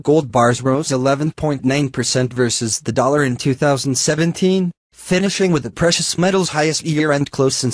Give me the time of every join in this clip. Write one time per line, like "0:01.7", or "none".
0:04.6